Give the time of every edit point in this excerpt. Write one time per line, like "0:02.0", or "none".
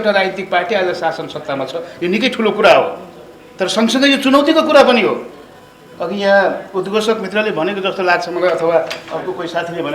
none